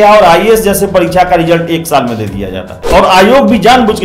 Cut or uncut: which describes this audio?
cut